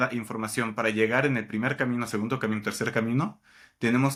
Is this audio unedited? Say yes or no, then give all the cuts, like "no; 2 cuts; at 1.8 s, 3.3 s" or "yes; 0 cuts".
yes; 0 cuts